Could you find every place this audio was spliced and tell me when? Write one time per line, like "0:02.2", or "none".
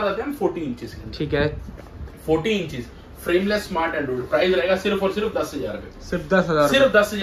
none